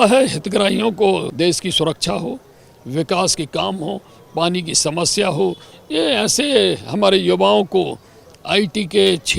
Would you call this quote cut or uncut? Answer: cut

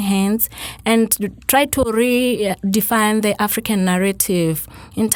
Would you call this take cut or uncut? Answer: uncut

